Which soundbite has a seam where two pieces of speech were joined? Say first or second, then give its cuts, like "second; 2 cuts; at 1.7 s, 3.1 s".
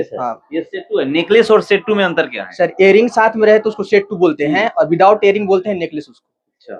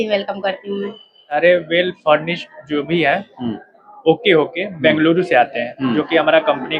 second; 1 cut; at 1.3 s